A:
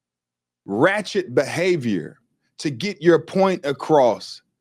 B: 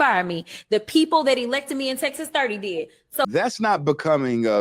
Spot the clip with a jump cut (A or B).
B